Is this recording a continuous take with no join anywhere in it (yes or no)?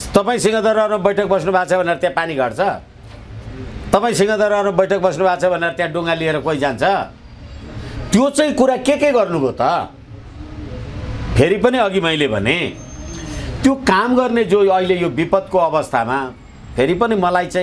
yes